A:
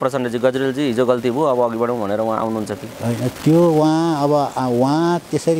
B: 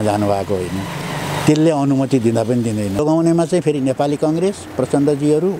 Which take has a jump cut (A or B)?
B